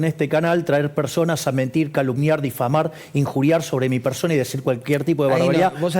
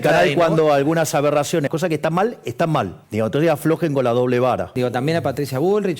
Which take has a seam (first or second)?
second